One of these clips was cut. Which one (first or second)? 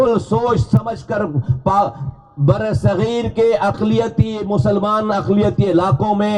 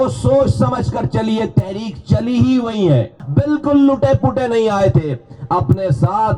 second